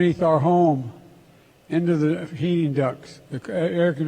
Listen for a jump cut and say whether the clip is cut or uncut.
cut